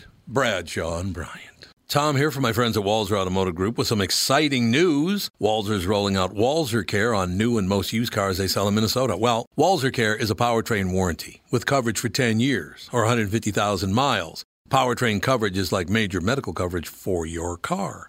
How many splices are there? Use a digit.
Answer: 1